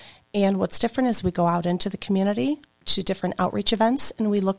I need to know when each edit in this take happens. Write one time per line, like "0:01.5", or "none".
0:02.8